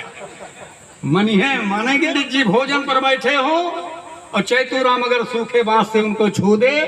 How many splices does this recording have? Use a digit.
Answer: 1